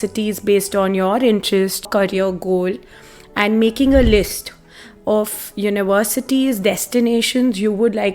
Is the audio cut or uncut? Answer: cut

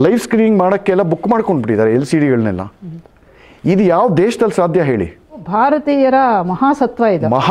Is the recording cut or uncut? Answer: cut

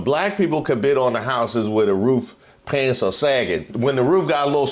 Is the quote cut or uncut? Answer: cut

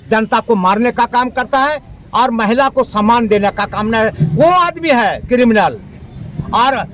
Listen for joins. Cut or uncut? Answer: uncut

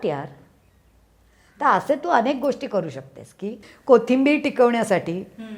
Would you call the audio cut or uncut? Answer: cut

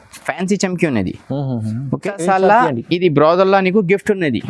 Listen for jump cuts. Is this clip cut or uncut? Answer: cut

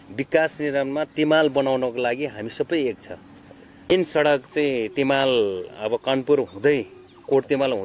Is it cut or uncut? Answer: cut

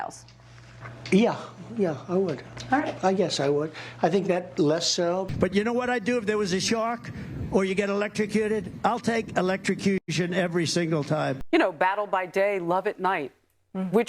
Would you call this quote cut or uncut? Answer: cut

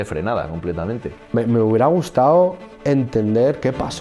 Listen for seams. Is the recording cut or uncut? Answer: cut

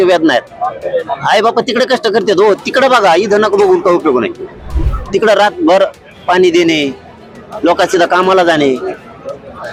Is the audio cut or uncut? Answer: uncut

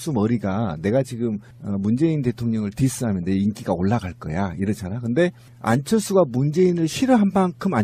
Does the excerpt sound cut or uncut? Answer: uncut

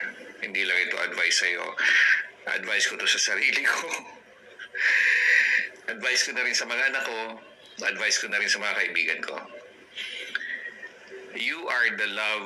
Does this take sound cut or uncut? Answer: uncut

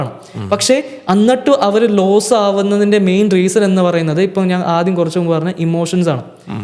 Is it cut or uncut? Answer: uncut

